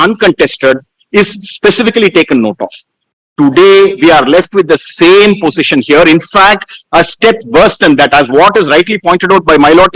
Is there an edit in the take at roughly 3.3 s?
no; 0 cuts

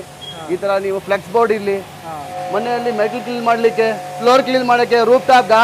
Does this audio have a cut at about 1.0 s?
no; 2 cuts; at 2.3 s, 4.1 s

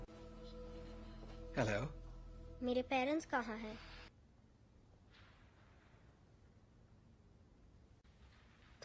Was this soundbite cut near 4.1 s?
yes; 1 cut; at 4.1 s

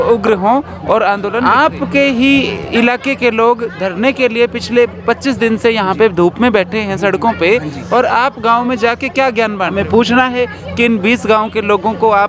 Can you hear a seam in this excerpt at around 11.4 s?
no; 2 cuts; at 1.4 s, 9.7 s

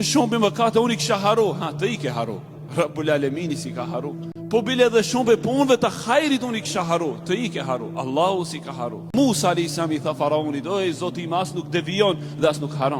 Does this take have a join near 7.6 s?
no; 2 cuts; at 4.3 s, 9.1 s

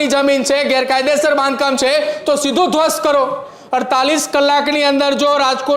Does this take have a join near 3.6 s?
yes; 1 cut; at 3.6 s

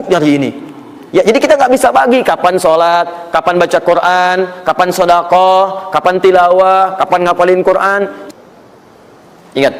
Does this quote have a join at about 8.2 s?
yes; 1 cut; at 8.2 s

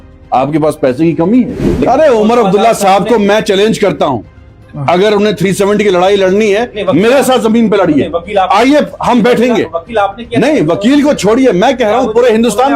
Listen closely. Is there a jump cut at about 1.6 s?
yes; 1 cut; at 1.6 s

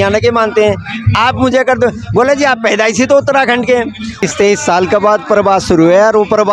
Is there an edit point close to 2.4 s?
no; 1 cut; at 4.2 s

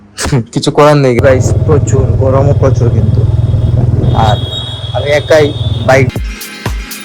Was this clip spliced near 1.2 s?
yes; 2 cuts; at 1.2 s, 6.1 s

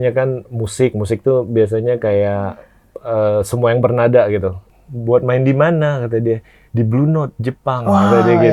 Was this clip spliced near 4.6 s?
yes; 1 cut; at 4.6 s

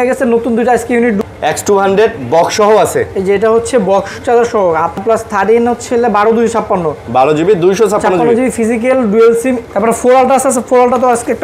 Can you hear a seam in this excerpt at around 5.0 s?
yes; 3 cuts; at 1.3 s, 5.0 s, 9.6 s

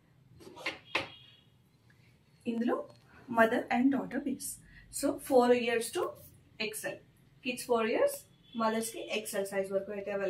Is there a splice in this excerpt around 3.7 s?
no; 0 cuts

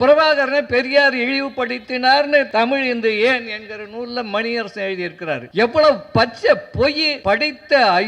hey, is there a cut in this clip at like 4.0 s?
no; 3 cuts; at 2.5 s, 5.4 s, 7.1 s

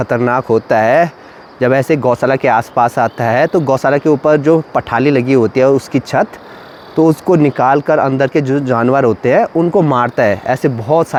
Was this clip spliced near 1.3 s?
no; 0 cuts

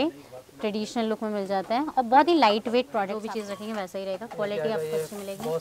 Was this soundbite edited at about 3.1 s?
yes; 1 cut; at 3.1 s

